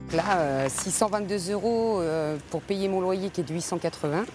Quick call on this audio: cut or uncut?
uncut